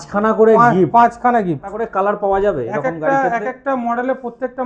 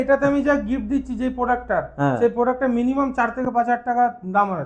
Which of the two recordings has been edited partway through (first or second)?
first